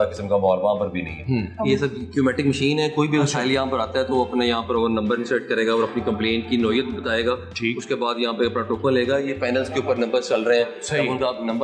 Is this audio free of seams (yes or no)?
no